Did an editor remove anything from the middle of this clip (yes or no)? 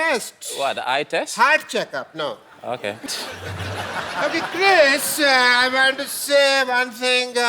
yes